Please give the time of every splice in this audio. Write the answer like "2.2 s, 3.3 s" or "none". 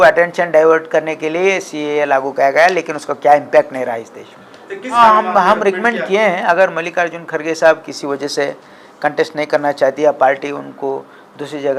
5.0 s